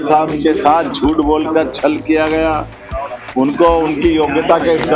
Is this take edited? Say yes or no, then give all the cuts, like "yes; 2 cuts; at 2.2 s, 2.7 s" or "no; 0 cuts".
no; 0 cuts